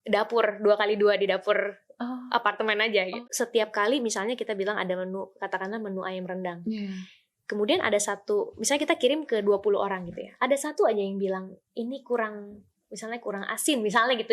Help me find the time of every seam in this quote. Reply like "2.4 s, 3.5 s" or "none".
3.1 s